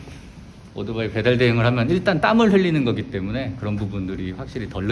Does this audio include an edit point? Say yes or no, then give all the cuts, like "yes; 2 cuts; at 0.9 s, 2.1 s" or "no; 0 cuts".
no; 0 cuts